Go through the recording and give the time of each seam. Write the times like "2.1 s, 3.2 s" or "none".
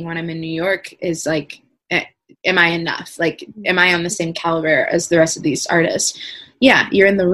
none